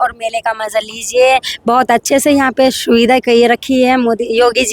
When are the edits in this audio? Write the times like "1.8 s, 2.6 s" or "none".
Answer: none